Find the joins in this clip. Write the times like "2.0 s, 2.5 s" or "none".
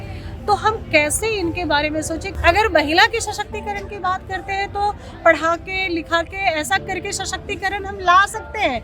2.2 s